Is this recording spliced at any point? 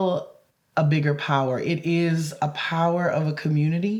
no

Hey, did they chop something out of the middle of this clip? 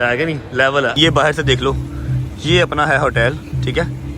yes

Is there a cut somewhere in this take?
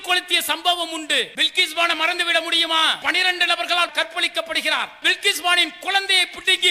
yes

